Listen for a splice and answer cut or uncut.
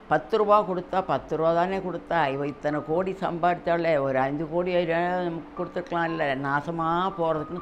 uncut